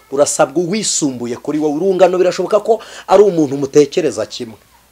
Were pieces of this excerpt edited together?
no; 0 cuts

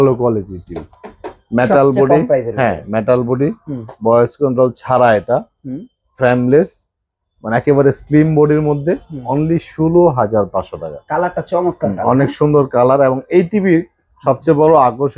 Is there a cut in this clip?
no; 0 cuts

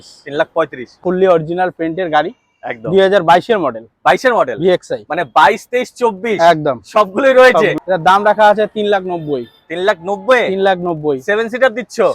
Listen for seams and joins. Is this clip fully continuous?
no; 2 cuts; at 1.0 s, 7.8 s

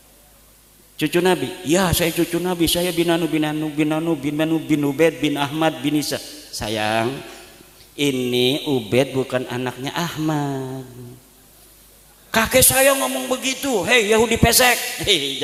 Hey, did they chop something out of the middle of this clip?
no; 0 cuts

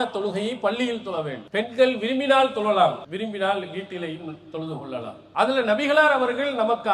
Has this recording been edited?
yes; 3 cuts; at 1.4 s, 3.0 s, 5.2 s

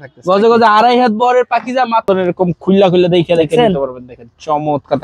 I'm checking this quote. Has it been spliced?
yes; 1 cut; at 2.0 s

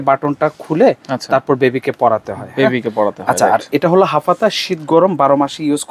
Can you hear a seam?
no; 0 cuts

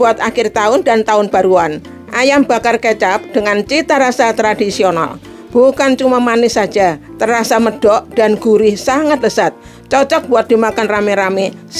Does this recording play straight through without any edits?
yes; 0 cuts

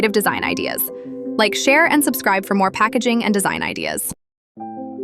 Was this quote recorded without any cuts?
no; 1 cut; at 4.0 s

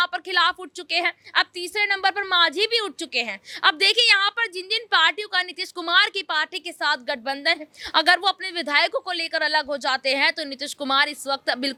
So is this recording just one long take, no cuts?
yes; 0 cuts

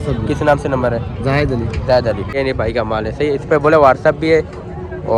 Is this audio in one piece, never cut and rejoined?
no; 1 cut; at 2.3 s

